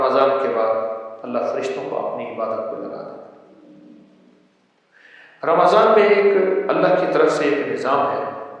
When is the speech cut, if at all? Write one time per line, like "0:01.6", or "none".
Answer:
none